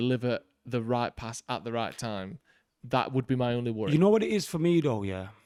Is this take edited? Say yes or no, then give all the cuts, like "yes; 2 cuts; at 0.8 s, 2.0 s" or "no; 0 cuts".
no; 0 cuts